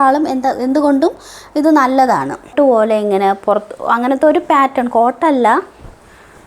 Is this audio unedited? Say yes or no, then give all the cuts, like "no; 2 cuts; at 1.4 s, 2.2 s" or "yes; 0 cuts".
no; 1 cut; at 2.5 s